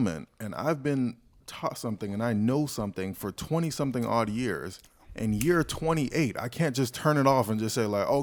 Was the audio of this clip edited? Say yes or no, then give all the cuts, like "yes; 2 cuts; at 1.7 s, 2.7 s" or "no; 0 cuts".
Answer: no; 0 cuts